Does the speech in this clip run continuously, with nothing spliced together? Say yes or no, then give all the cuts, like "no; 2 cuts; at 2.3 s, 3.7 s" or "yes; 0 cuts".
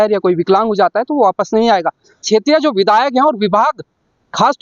no; 1 cut; at 2.2 s